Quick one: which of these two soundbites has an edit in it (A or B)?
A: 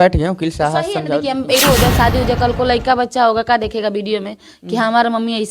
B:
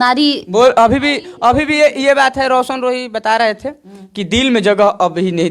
A